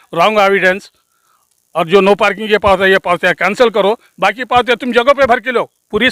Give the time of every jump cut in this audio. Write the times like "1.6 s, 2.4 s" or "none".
none